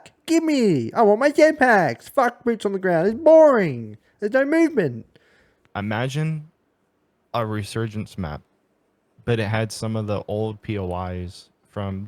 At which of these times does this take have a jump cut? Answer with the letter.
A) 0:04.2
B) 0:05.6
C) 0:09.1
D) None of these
B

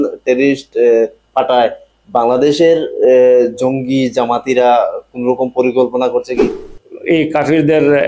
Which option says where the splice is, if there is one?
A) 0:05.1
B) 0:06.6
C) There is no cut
B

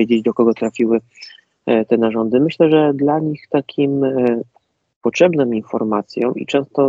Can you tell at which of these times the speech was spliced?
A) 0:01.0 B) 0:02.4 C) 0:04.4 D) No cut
D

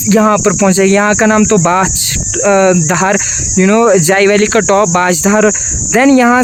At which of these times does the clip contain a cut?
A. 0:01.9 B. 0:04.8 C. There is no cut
C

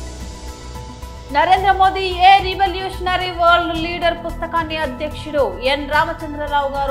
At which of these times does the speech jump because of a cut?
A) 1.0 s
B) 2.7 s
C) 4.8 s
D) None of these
A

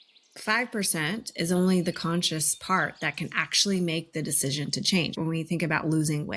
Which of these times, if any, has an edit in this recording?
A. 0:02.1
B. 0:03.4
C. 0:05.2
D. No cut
C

